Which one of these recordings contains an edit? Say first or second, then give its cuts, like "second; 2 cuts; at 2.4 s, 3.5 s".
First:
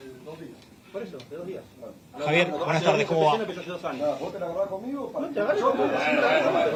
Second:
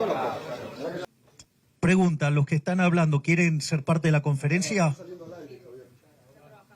second; 1 cut; at 1.0 s